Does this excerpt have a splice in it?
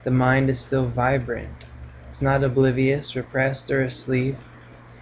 no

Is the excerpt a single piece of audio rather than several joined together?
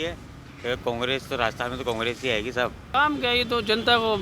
no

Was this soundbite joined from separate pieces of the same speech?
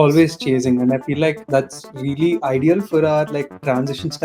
yes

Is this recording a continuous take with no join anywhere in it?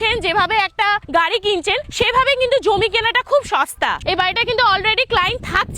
no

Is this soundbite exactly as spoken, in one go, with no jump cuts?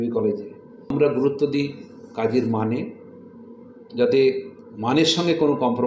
no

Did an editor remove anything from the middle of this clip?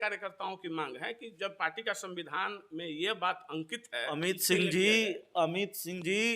yes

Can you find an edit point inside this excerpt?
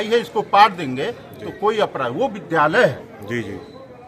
no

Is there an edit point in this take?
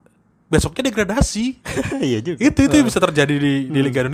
no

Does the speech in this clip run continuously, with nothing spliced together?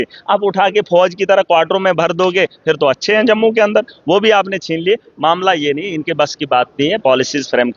yes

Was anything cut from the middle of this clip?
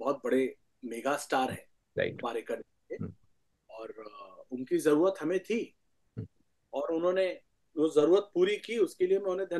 no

